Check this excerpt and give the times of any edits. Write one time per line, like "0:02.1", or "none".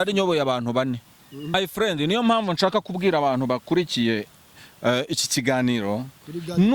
0:01.6